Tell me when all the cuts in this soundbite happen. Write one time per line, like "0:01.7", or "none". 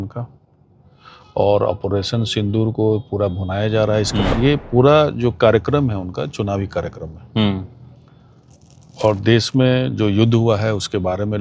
0:04.3